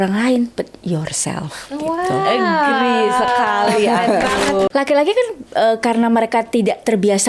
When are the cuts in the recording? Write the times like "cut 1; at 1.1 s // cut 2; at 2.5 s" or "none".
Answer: cut 1; at 4.7 s